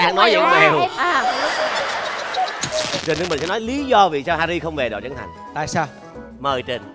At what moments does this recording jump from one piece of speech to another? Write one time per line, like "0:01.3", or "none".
0:02.8

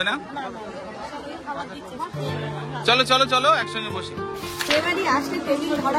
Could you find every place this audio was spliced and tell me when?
none

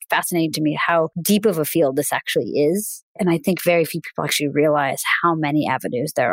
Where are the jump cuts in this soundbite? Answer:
0:01.2
0:03.0

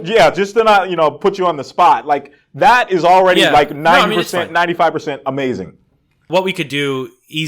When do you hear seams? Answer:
0:06.2

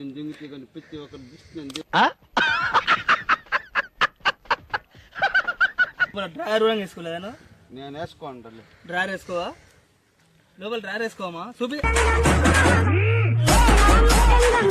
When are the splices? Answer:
0:06.1
0:11.9

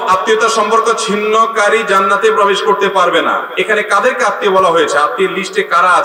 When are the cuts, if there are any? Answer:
none

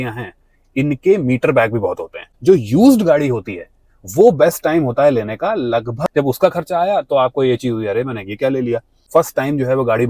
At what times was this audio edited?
0:02.3
0:06.0
0:08.9

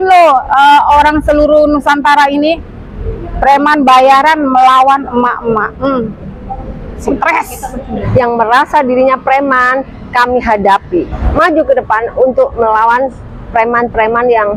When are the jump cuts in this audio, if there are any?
0:08.0
0:11.2

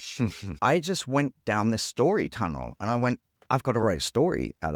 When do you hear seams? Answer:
0:03.8

